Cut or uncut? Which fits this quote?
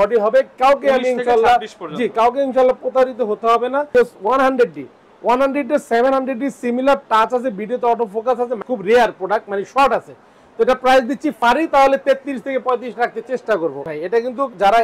cut